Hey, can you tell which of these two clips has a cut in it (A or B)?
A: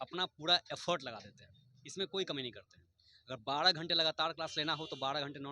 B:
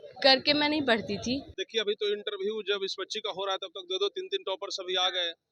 B